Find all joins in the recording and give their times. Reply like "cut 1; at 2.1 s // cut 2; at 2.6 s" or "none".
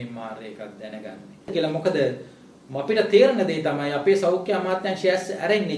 cut 1; at 1.5 s

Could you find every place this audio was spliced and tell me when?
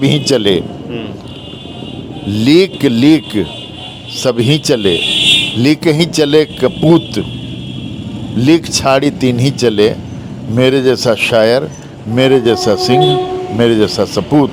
none

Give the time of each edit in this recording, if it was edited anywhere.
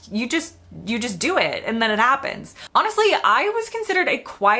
cut 1; at 2.6 s

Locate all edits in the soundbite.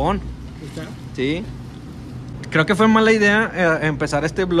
cut 1; at 2.3 s

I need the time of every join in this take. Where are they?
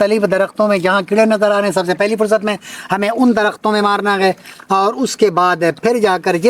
none

